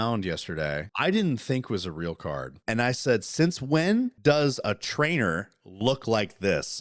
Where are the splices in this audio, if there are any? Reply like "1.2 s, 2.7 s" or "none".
0.9 s, 2.5 s, 4.1 s